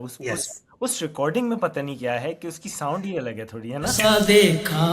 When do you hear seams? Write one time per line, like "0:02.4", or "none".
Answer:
0:04.0